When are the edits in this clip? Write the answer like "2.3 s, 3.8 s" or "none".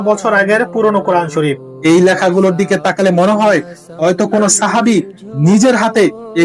1.7 s

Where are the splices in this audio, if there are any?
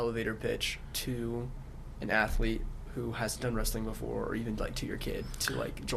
none

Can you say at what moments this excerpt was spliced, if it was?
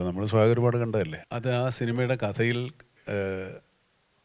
1.2 s

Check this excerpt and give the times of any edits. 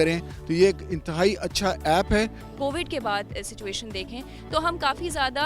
2.4 s

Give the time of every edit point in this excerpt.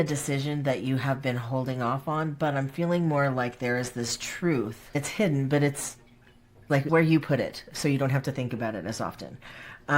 4.9 s, 6.9 s

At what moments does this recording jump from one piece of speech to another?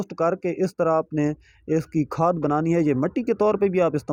none

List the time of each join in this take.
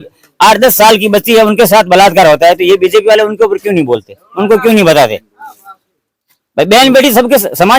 none

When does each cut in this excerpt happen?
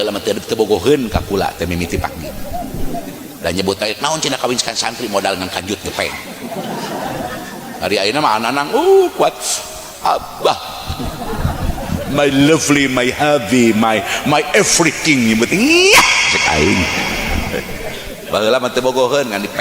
none

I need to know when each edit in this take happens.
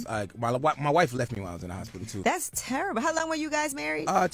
2.1 s

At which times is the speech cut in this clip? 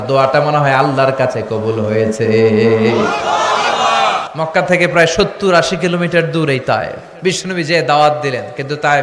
4.2 s, 7.0 s

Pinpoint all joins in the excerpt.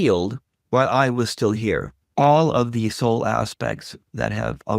2.0 s

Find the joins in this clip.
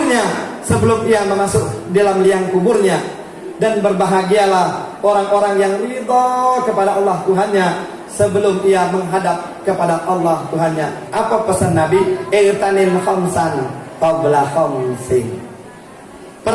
11.1 s

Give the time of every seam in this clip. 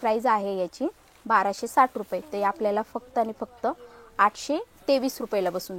none

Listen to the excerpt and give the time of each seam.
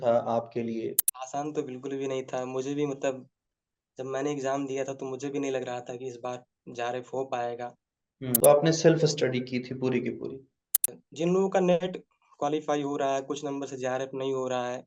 1.1 s, 8.4 s, 11.0 s

